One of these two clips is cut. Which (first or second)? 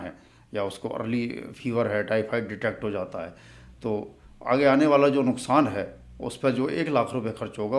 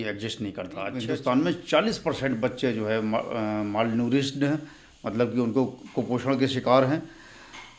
second